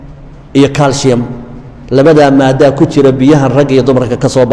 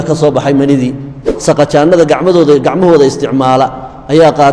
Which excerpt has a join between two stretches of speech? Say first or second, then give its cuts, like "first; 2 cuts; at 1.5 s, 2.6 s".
second; 1 cut; at 1.2 s